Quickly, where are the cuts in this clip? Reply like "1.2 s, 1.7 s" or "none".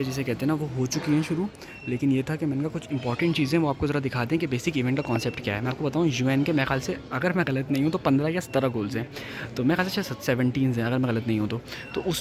none